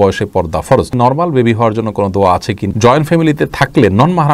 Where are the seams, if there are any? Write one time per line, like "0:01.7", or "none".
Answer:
0:00.9
0:02.6